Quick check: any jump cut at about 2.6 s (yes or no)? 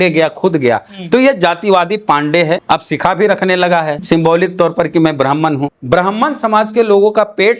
yes